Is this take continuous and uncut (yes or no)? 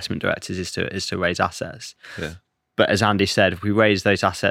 yes